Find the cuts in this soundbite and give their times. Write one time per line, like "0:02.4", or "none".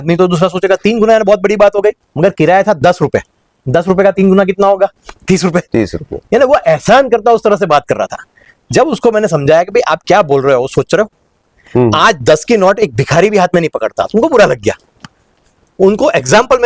none